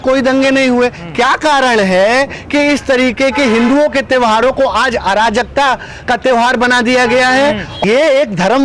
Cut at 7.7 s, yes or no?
yes